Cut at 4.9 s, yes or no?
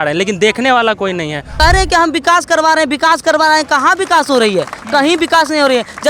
no